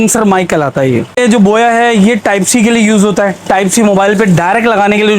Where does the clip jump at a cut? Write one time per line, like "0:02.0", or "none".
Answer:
0:01.2